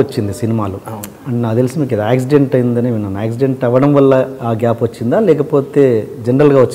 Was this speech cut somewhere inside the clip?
no; 0 cuts

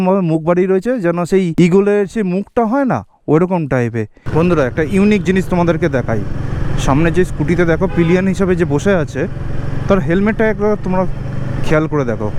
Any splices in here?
yes; 2 cuts; at 1.5 s, 4.2 s

